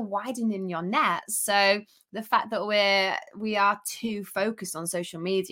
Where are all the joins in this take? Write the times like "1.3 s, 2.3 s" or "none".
none